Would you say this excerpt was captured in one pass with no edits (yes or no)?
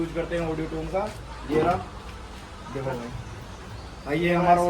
yes